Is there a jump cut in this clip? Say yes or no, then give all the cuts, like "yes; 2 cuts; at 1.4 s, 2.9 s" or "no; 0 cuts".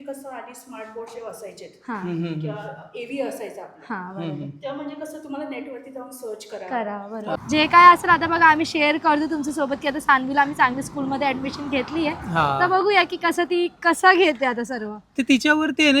yes; 1 cut; at 7.4 s